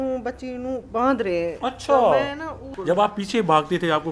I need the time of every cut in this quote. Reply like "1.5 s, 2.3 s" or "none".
2.7 s